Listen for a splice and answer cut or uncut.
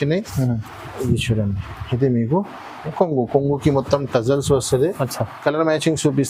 uncut